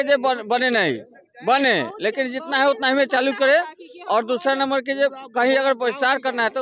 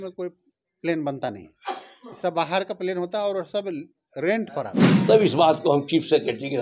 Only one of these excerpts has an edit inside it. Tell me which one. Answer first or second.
second